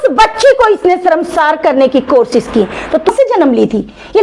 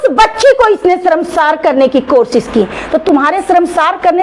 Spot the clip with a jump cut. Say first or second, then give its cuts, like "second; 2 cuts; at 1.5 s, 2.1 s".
first; 1 cut; at 3.1 s